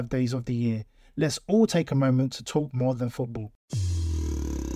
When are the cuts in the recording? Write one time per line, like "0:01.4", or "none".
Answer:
0:03.7